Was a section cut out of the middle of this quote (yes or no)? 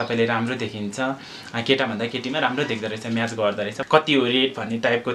yes